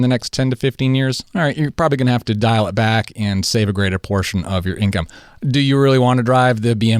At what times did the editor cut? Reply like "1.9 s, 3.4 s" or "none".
none